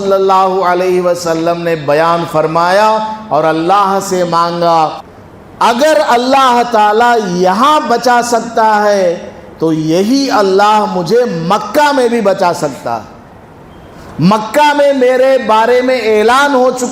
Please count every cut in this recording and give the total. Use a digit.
1